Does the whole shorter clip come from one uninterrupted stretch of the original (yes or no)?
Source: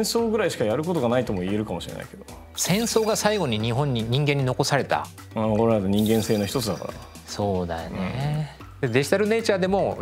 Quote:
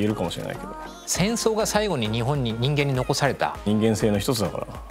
no